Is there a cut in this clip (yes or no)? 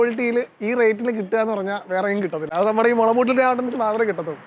no